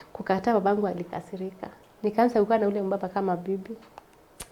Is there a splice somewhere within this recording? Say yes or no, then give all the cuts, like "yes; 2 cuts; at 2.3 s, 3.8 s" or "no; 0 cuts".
yes; 1 cut; at 1.7 s